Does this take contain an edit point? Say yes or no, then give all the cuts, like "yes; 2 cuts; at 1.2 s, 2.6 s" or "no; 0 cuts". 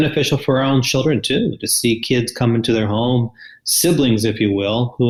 no; 0 cuts